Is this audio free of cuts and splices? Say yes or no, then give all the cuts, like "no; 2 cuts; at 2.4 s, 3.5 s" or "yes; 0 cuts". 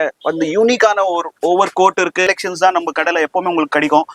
no; 1 cut; at 2.3 s